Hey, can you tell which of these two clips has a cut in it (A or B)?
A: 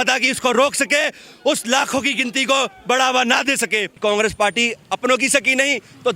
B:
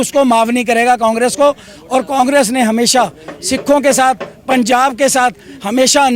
A